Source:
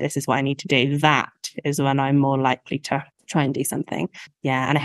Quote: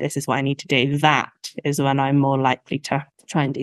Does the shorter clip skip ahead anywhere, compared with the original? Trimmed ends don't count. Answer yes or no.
no